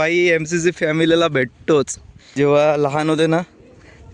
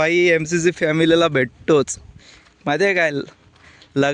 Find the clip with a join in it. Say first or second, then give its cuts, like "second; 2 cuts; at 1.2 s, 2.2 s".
first; 1 cut; at 2.3 s